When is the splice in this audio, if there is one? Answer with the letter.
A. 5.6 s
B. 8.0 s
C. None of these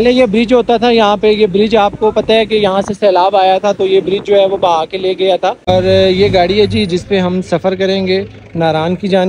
A